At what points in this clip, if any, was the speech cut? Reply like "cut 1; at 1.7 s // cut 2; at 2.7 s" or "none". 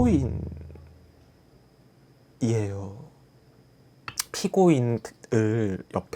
cut 1; at 4.0 s

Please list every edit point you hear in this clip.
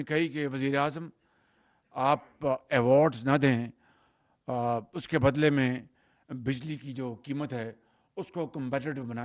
none

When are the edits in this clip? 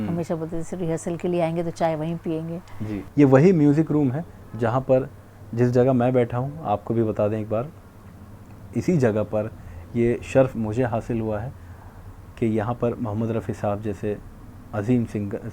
cut 1; at 2.9 s

